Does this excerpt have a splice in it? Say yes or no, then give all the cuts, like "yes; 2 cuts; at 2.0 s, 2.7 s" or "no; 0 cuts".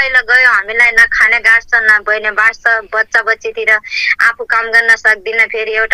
no; 0 cuts